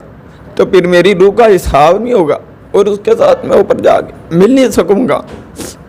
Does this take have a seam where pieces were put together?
no; 0 cuts

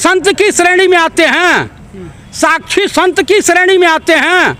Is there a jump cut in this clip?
no; 0 cuts

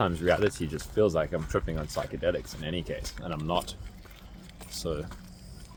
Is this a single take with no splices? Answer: yes; 0 cuts

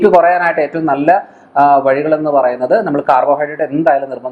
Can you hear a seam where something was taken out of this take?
no; 0 cuts

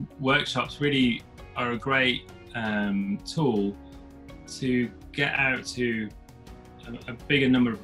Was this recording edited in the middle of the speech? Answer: no; 0 cuts

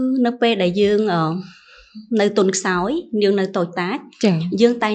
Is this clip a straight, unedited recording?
yes; 0 cuts

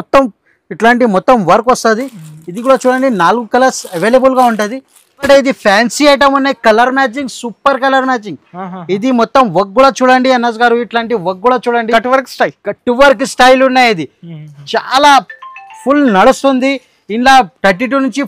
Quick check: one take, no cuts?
no; 1 cut; at 5.3 s

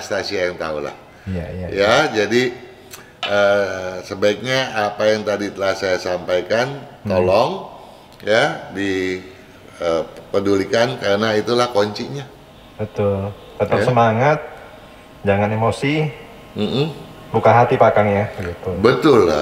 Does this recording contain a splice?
no; 0 cuts

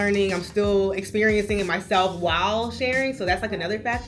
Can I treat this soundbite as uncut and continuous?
yes; 0 cuts

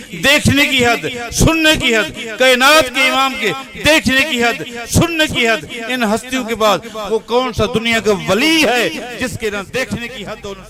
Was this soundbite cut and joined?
no; 0 cuts

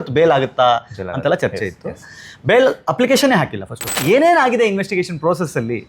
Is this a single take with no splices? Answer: no; 1 cut; at 3.9 s

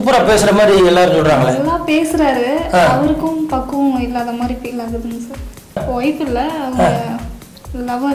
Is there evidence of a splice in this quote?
yes; 1 cut; at 5.8 s

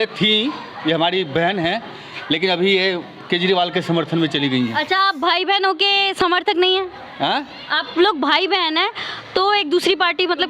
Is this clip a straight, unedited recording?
yes; 0 cuts

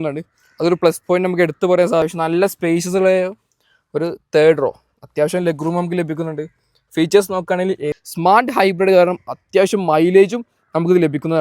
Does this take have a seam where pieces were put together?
yes; 2 cuts; at 2.0 s, 7.9 s

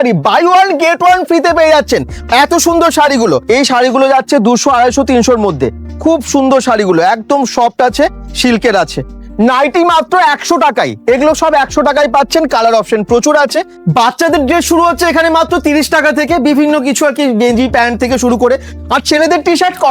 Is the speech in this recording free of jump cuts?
no; 4 cuts; at 3.4 s, 9.2 s, 13.7 s, 18.7 s

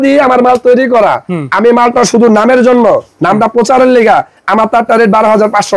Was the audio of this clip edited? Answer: no; 0 cuts

